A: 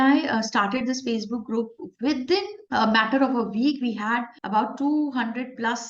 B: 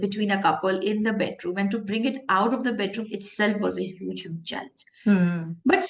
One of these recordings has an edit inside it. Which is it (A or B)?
A